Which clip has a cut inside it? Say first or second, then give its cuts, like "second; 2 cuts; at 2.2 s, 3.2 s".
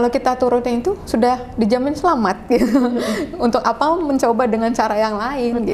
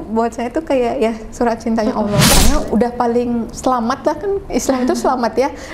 second; 1 cut; at 2.3 s